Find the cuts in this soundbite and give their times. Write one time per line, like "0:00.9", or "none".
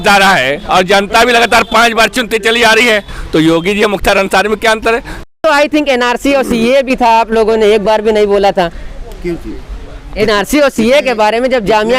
0:05.3